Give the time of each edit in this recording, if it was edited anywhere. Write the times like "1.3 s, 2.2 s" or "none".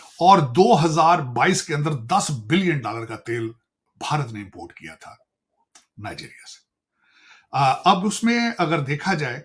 none